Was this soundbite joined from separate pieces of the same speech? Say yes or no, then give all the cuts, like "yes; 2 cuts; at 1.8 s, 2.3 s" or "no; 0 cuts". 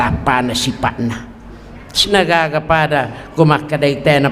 yes; 1 cut; at 2.1 s